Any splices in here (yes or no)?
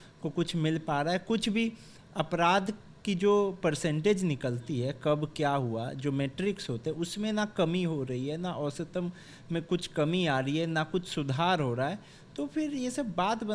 no